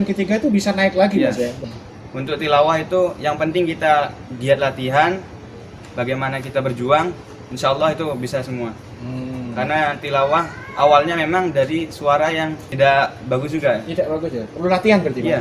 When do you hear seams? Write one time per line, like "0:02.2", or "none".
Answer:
0:01.6
0:05.8
0:12.6